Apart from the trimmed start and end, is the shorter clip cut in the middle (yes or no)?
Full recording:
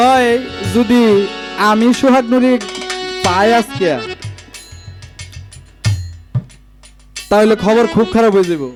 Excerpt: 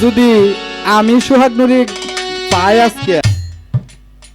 yes